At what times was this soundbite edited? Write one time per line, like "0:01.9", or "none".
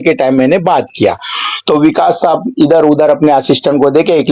none